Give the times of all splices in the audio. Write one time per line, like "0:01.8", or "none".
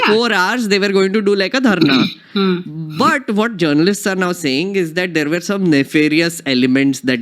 none